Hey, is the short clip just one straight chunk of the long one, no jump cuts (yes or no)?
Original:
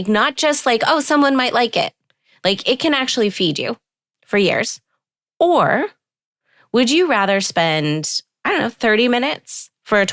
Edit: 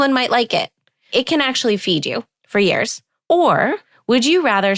no